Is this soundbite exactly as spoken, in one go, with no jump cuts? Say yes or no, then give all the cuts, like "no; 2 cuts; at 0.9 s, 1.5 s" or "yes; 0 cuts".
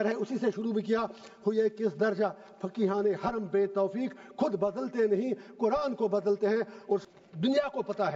no; 1 cut; at 7.0 s